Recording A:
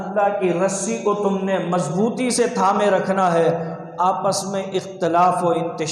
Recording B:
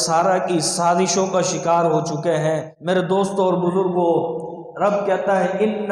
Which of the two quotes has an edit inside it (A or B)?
B